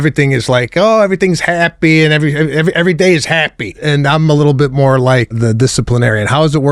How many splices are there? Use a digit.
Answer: 2